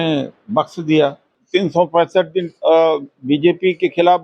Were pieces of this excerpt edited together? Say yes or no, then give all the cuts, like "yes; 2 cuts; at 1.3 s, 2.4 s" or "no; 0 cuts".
yes; 1 cut; at 1.3 s